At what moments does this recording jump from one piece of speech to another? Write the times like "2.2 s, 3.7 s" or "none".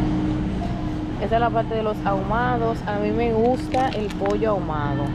none